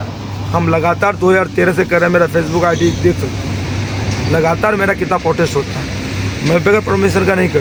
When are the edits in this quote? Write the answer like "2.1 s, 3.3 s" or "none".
none